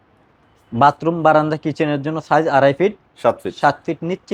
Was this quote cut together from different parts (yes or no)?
no